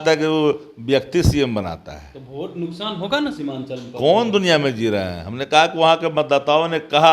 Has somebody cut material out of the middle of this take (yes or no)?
no